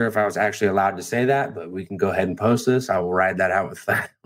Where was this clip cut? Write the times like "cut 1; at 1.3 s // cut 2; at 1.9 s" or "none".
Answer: none